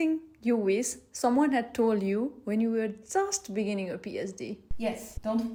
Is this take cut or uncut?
uncut